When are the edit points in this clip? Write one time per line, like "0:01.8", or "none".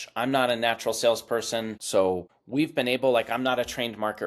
0:01.8
0:02.3